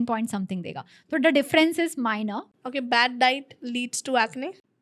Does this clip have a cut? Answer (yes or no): yes